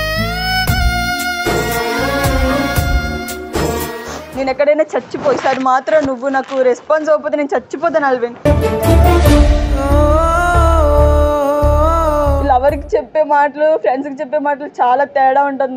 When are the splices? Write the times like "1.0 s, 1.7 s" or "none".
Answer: 3.9 s, 12.4 s